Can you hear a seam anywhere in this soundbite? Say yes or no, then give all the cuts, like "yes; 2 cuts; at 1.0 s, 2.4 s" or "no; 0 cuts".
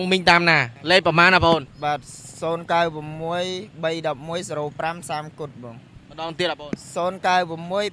no; 0 cuts